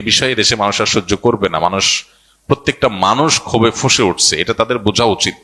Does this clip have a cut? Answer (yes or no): no